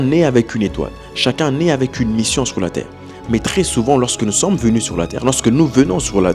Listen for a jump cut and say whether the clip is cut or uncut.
uncut